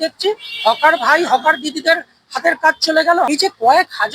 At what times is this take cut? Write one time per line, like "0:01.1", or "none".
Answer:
0:03.3